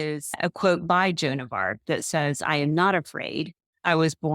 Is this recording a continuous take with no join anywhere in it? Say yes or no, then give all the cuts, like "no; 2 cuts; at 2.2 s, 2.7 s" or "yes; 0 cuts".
yes; 0 cuts